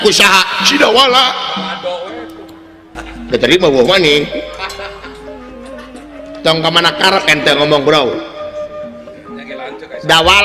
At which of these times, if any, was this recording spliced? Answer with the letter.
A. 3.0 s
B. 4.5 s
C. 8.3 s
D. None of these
A